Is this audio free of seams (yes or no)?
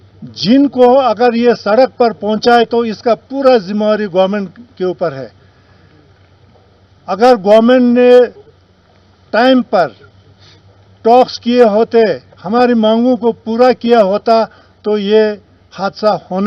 yes